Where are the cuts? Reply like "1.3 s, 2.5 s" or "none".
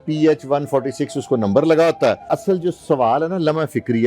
2.3 s